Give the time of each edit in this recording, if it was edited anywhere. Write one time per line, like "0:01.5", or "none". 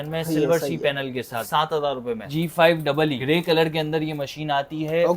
0:01.4
0:02.3
0:03.2